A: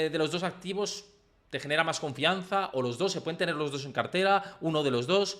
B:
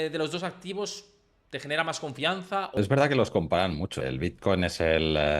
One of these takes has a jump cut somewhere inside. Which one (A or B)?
B